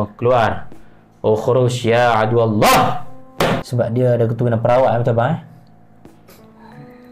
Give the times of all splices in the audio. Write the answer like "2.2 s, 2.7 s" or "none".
3.7 s